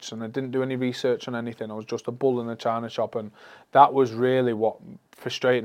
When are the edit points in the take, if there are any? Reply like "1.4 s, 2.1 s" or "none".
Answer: none